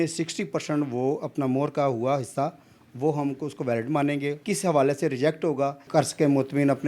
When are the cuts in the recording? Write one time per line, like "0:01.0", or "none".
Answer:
0:04.4
0:05.8